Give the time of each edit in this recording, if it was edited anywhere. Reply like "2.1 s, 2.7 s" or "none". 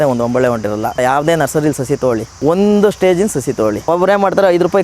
1.0 s, 2.3 s, 3.8 s